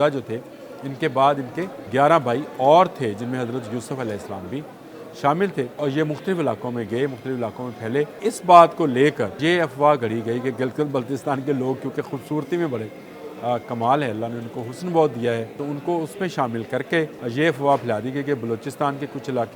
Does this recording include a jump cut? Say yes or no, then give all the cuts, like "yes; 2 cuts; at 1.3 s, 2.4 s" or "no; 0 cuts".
yes; 6 cuts; at 1.7 s, 5.8 s, 8.2 s, 9.4 s, 15.6 s, 17.2 s